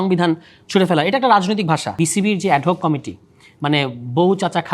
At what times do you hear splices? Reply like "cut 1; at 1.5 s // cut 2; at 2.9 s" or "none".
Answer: cut 1; at 2.0 s